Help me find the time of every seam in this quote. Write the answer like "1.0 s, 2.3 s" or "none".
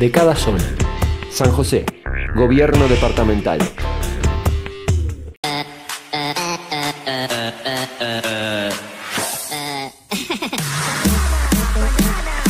5.7 s